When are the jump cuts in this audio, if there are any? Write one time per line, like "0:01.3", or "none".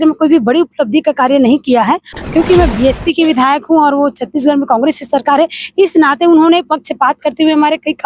0:02.2